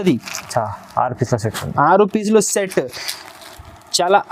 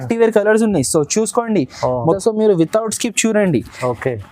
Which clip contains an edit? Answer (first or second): second